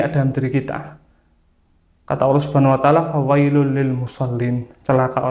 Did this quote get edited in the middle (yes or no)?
no